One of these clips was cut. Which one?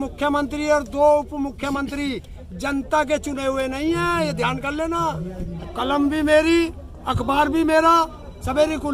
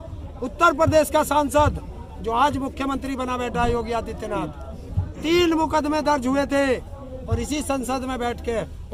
first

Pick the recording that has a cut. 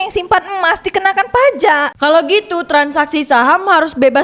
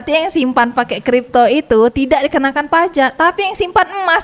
first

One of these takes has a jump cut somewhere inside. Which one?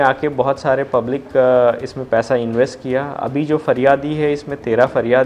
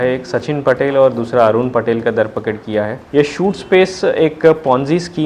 second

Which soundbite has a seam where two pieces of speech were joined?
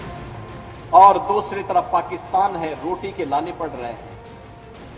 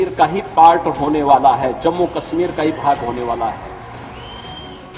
first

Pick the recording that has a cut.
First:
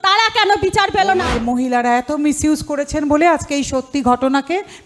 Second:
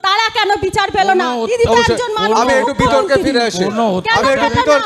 first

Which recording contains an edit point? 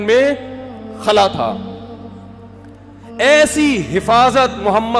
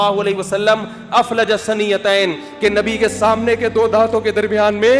first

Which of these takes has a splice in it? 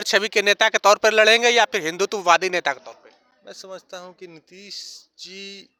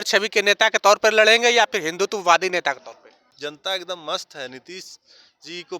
second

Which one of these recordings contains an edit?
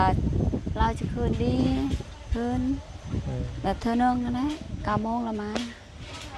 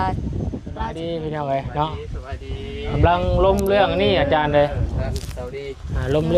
second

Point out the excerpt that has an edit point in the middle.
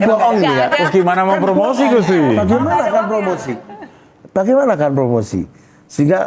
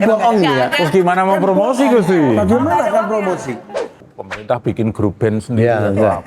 second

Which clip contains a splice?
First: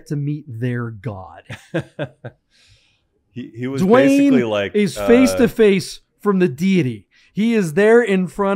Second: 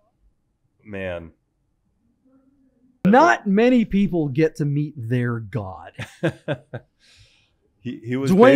second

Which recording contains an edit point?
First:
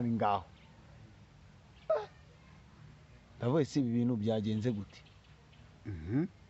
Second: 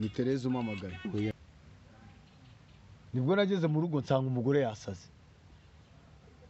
second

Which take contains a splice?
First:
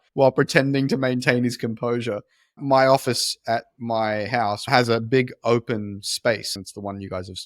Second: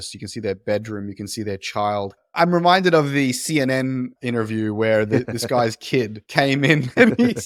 first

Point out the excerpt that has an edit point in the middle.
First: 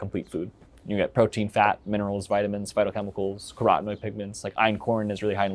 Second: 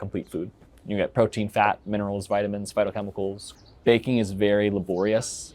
second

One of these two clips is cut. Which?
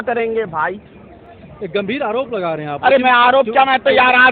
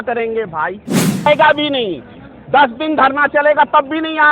second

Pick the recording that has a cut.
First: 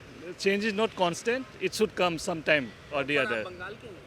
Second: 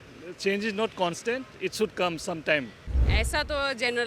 second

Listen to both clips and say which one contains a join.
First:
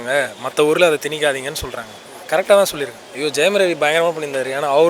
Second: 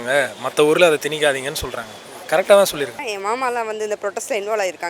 second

